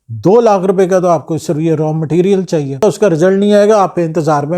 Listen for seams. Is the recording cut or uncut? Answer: cut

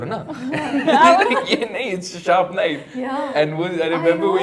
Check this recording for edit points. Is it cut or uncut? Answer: uncut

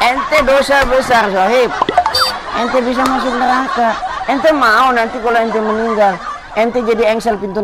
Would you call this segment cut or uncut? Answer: uncut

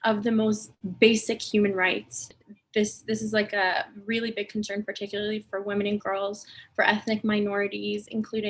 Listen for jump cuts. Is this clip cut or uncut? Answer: cut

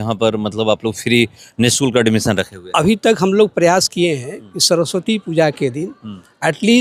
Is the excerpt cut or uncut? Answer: uncut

